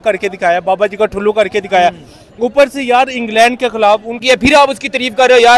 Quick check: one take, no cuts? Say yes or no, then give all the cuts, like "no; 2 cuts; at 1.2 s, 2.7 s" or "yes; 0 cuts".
no; 1 cut; at 4.2 s